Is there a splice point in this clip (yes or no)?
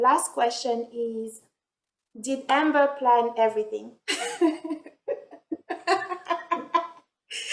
no